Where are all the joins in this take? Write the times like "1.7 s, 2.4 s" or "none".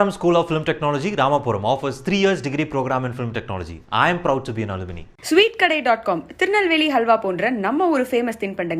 none